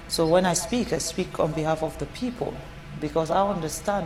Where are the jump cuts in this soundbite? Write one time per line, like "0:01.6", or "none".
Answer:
none